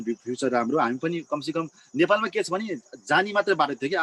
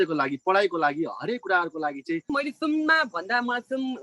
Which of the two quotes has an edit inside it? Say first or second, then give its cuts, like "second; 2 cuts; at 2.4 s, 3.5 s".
second; 1 cut; at 2.3 s